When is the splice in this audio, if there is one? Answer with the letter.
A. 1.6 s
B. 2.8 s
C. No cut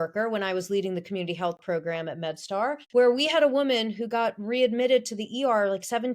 B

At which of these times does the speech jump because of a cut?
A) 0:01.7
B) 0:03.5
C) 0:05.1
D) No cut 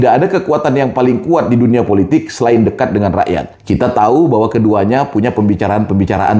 B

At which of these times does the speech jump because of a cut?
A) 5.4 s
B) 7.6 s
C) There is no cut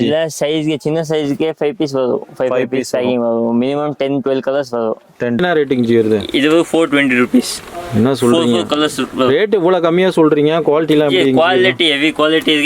A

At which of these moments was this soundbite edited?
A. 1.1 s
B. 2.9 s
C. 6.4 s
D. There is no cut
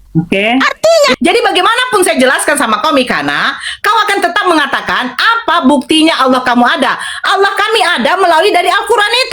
A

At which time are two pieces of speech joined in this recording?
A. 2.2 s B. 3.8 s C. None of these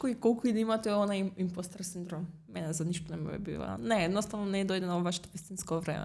C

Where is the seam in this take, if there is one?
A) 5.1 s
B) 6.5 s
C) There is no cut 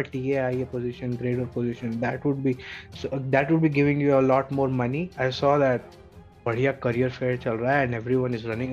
A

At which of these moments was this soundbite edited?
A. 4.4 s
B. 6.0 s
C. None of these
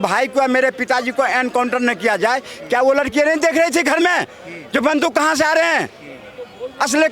C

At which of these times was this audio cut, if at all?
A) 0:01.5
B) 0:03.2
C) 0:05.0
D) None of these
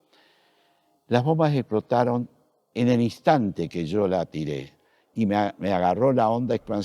C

